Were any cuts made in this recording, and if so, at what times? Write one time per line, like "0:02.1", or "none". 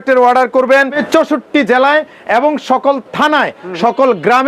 0:01.0